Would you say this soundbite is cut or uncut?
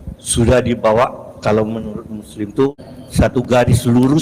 cut